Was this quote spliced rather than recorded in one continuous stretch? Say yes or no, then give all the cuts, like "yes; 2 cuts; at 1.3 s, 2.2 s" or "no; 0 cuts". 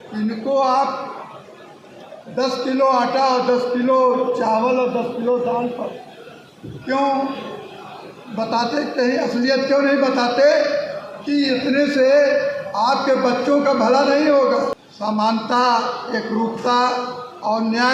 yes; 1 cut; at 14.9 s